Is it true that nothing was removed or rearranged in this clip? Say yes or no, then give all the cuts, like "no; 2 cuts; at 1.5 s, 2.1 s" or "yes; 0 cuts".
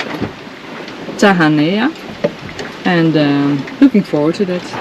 yes; 0 cuts